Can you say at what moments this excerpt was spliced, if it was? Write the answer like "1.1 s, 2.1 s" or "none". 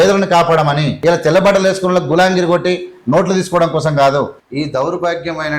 0.9 s, 4.4 s